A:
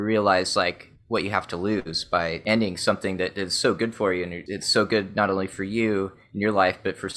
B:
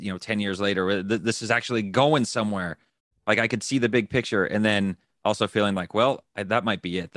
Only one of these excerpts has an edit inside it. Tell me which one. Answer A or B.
A